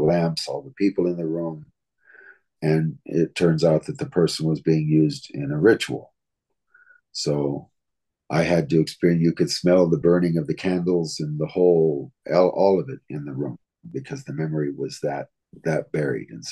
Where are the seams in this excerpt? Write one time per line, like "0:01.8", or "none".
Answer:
0:15.4

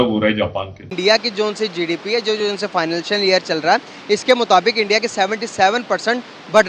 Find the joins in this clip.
0:00.9

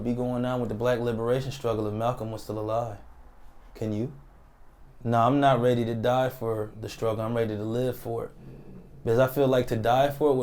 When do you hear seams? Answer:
0:04.9

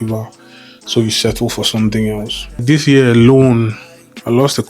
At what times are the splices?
0:02.6

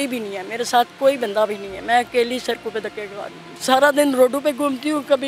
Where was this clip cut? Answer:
0:03.5

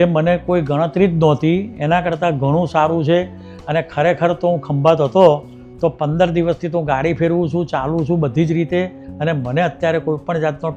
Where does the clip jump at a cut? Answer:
0:09.0

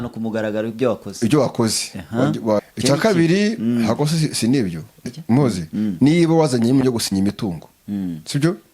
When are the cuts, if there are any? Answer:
0:02.6
0:05.0

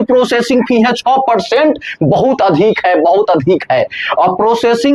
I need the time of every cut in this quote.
none

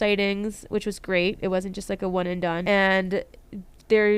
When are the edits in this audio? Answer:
0:02.6

